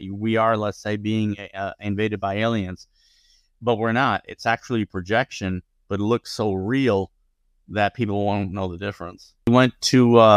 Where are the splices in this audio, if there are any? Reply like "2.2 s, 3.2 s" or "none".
9.5 s